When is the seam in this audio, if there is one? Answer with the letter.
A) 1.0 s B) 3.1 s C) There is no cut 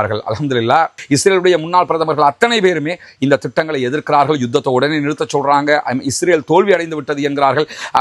A